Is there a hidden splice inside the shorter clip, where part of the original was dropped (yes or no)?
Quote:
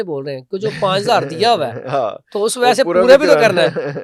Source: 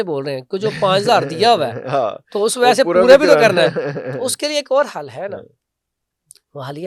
no